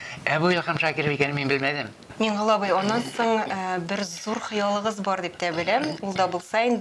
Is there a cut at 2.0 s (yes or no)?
yes